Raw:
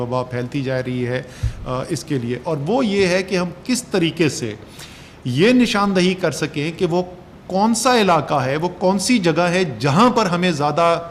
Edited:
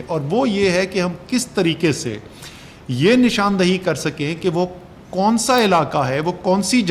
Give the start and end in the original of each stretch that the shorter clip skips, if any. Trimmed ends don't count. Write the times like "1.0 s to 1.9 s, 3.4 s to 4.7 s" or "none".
none